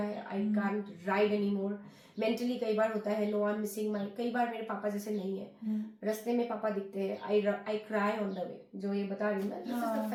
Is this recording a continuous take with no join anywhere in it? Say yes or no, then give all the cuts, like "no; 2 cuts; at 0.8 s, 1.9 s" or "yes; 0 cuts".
yes; 0 cuts